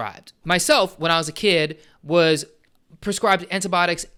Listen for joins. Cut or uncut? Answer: uncut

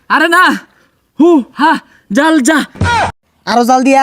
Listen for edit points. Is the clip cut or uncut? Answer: cut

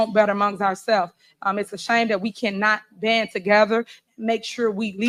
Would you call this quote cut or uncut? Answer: uncut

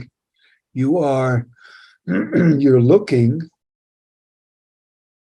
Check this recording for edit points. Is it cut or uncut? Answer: uncut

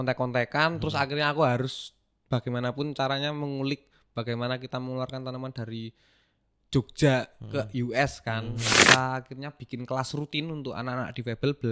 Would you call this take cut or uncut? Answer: cut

